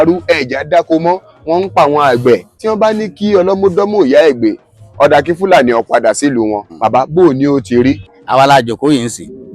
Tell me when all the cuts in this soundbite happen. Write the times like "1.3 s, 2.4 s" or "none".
2.6 s, 6.9 s, 8.1 s